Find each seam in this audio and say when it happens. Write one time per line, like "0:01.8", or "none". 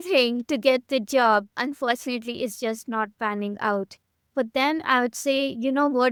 none